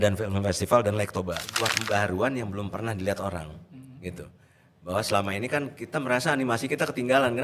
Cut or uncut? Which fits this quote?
cut